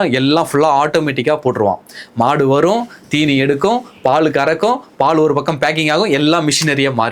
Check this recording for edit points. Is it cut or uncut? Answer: uncut